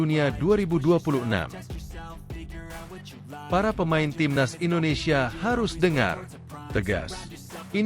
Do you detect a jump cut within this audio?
yes; 2 cuts; at 1.9 s, 3.5 s

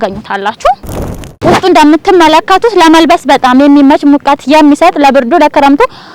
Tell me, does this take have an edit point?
yes; 1 cut; at 1.3 s

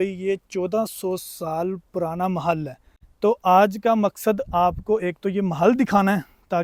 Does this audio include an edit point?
no; 0 cuts

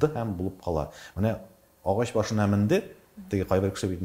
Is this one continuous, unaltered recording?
no; 1 cut; at 1.0 s

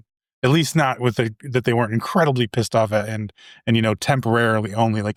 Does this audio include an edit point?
no; 0 cuts

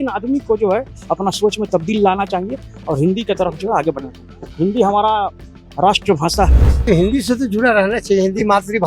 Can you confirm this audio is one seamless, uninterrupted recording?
no; 1 cut; at 6.8 s

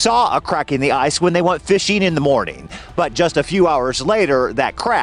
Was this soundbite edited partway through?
no; 0 cuts

